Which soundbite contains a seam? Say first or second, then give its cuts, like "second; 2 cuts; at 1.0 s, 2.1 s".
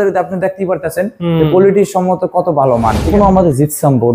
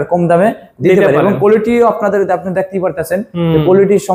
first; 1 cut; at 3.1 s